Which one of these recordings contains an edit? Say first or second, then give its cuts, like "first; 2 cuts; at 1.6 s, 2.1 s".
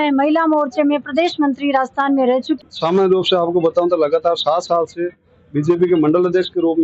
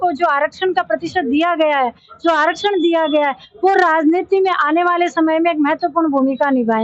first; 1 cut; at 2.6 s